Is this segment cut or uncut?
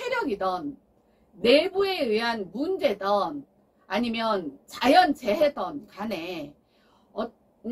uncut